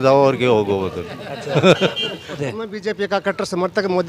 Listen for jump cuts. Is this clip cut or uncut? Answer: cut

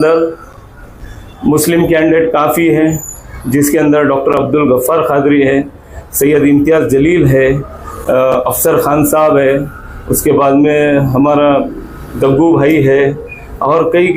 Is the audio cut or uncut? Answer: uncut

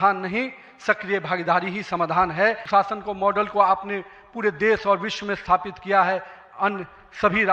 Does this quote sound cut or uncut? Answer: cut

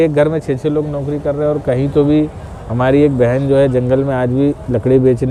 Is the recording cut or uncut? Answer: uncut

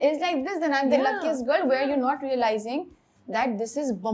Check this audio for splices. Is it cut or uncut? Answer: uncut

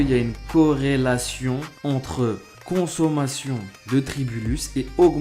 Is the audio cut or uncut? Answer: cut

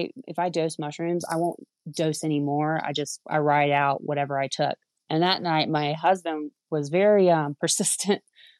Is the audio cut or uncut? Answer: cut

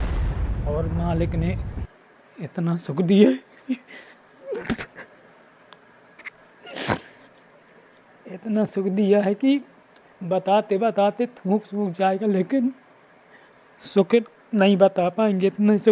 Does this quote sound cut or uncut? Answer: uncut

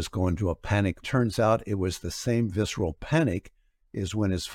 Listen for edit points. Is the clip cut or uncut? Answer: cut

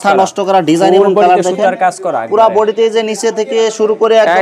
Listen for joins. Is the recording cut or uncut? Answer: uncut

